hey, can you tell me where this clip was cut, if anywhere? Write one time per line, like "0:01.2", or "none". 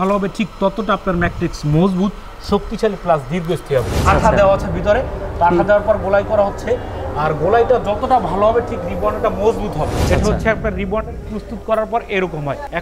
0:04.0
0:10.0